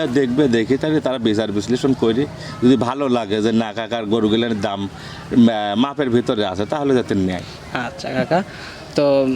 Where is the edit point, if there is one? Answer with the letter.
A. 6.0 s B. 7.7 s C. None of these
C